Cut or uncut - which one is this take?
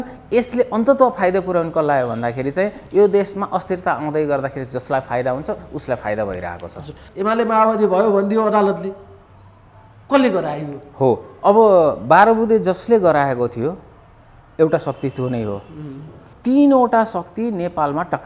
cut